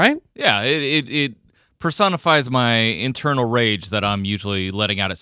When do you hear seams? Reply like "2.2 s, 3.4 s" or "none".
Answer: none